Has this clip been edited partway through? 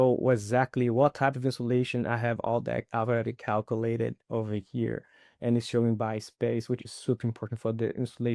no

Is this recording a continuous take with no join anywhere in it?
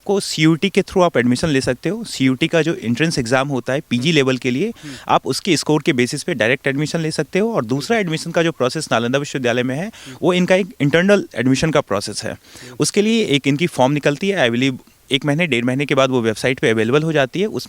yes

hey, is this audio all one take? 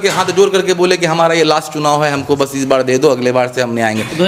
yes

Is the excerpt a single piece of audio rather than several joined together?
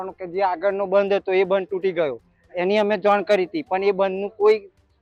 yes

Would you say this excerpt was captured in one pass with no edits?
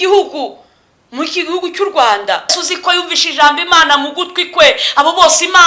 no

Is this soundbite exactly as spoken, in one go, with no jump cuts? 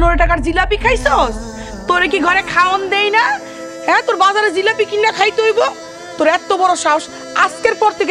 yes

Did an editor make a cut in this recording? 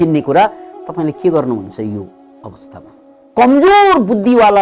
yes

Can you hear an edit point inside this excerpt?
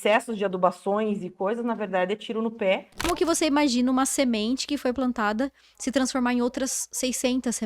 yes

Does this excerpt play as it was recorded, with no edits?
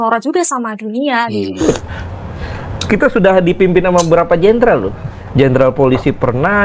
no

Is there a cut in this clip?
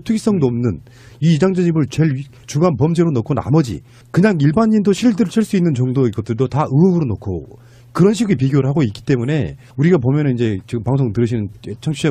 yes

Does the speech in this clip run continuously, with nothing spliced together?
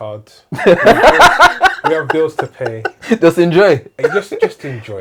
yes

